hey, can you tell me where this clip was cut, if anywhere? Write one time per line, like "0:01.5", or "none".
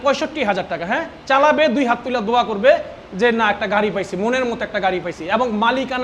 none